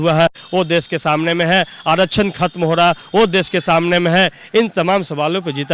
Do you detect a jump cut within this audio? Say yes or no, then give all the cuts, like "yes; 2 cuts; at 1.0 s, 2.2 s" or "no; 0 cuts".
no; 0 cuts